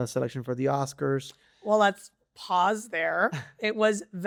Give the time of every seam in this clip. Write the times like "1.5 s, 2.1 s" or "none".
none